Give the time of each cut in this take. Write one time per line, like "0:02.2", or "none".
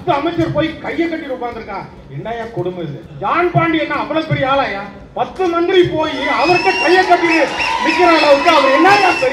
0:03.0